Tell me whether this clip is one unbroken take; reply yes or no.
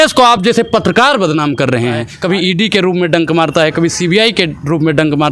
no